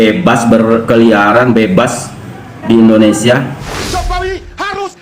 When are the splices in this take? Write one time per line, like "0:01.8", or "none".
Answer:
0:03.6